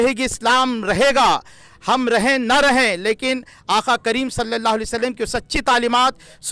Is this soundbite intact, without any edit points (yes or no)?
yes